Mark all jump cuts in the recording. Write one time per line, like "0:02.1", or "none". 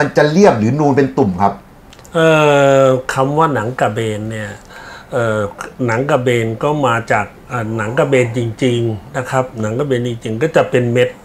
none